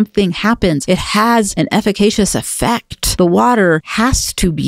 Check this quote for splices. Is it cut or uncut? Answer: cut